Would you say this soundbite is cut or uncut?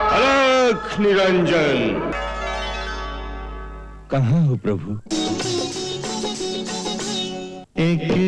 uncut